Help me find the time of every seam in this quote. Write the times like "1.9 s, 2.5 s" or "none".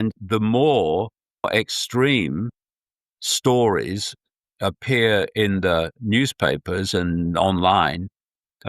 1.5 s